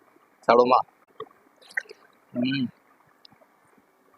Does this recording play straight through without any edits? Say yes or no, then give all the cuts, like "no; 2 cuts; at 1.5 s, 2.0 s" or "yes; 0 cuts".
no; 1 cut; at 1.0 s